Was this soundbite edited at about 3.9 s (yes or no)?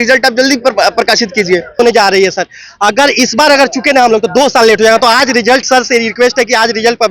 no